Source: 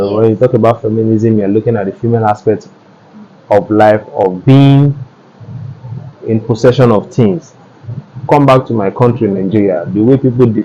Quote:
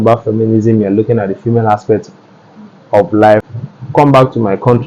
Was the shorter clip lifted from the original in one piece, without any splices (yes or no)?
no